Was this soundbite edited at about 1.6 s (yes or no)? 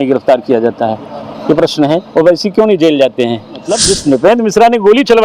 no